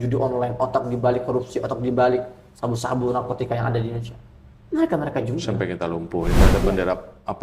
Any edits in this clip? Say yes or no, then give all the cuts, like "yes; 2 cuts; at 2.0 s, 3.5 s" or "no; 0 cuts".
yes; 1 cut; at 6.4 s